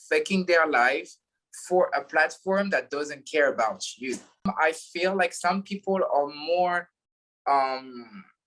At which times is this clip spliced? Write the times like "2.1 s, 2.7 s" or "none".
4.5 s